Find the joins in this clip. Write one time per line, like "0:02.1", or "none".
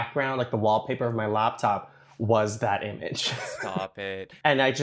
0:03.8